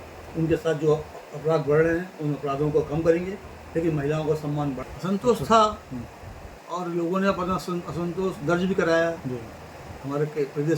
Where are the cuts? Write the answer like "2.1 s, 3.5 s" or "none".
4.8 s